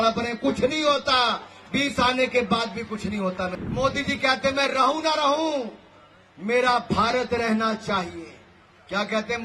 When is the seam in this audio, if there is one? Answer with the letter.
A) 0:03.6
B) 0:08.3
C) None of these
A